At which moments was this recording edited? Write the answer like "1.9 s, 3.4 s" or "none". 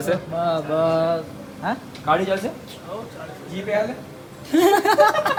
none